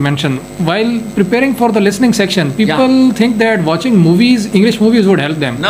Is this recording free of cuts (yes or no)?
yes